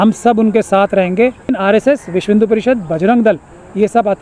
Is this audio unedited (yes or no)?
no